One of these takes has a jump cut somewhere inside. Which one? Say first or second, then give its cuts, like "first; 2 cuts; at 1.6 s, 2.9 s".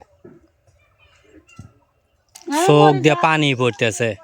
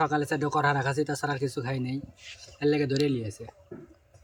first; 1 cut; at 2.3 s